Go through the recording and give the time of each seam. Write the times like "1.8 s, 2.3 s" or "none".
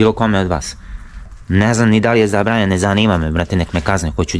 1.3 s